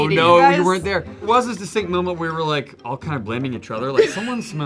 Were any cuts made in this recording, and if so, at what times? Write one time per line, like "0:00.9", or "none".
0:01.3